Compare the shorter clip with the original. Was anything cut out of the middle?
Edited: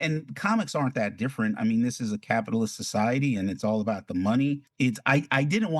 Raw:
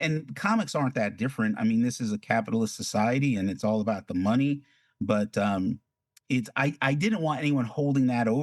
yes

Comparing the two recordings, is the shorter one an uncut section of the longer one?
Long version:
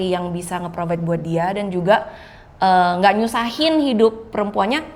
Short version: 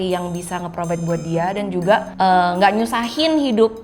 no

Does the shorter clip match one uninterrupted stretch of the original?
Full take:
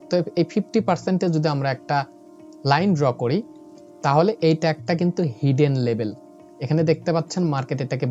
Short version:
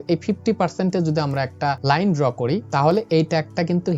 no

